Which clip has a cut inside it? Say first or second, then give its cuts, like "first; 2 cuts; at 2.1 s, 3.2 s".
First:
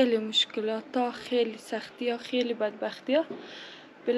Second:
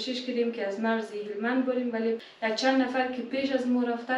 second; 1 cut; at 2.2 s